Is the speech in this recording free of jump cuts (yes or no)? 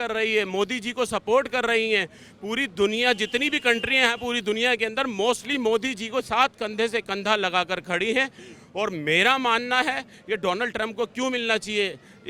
yes